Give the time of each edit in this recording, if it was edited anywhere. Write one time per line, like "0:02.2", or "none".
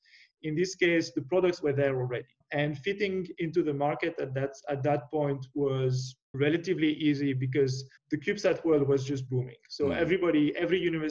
0:02.4
0:06.3
0:07.9
0:09.3